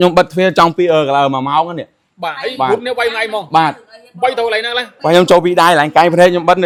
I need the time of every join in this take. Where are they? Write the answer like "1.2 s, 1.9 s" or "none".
none